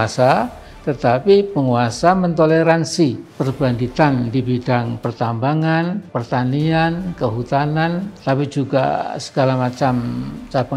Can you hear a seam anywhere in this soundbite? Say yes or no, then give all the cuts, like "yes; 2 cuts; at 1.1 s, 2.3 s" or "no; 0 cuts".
no; 0 cuts